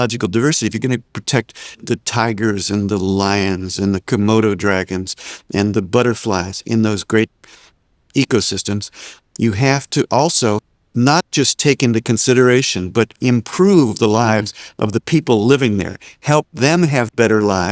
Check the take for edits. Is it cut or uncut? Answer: cut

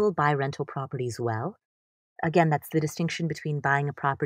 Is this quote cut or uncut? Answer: uncut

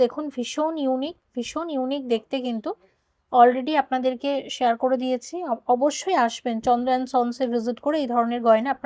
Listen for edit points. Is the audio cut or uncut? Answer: uncut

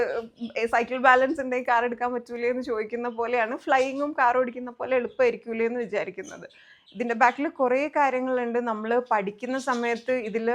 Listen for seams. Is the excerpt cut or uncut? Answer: uncut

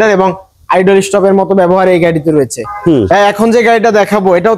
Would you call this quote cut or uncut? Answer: cut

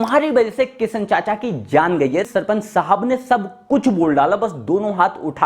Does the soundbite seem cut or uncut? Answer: cut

